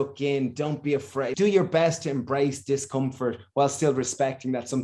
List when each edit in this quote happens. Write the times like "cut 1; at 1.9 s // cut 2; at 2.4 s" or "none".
cut 1; at 1.3 s